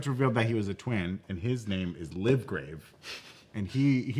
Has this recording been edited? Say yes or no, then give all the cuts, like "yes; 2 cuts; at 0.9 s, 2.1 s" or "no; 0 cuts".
no; 0 cuts